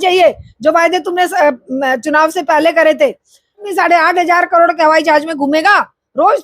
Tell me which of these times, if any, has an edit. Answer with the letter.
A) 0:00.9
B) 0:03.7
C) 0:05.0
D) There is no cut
B